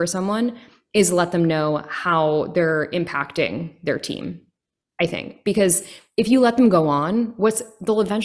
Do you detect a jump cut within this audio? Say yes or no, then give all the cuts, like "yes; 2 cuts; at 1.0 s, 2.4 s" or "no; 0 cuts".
no; 0 cuts